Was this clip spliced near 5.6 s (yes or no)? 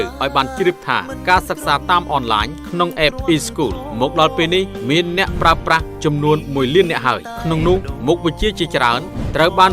yes